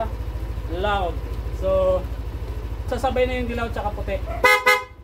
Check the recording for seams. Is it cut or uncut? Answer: cut